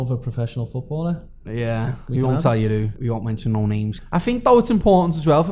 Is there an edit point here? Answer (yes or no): yes